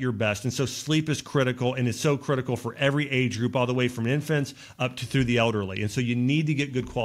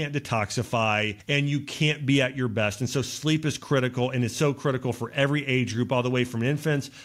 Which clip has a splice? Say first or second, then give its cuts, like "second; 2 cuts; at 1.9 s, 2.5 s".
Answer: second; 1 cut; at 1.2 s